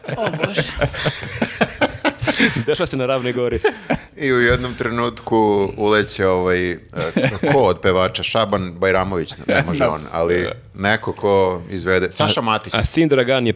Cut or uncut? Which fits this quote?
uncut